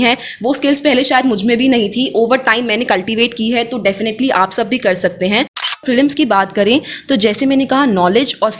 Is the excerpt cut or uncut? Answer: cut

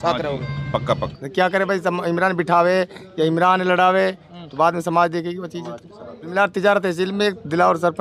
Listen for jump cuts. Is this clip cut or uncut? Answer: cut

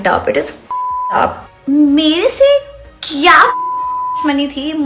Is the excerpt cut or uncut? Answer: cut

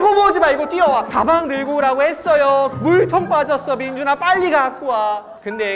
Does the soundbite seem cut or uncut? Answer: cut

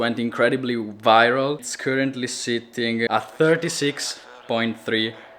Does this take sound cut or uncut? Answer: cut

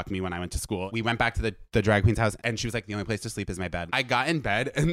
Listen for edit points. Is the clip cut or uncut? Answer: cut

